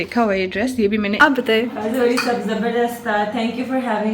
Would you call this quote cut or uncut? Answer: cut